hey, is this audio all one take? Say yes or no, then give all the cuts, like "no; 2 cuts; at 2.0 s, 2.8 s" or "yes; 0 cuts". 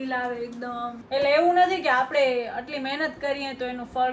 no; 1 cut; at 1.0 s